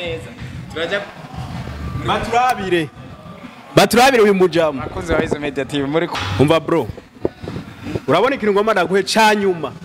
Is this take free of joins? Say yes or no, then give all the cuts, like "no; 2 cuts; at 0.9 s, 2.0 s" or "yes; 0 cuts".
no; 1 cut; at 6.1 s